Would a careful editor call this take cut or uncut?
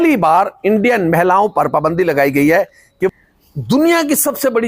cut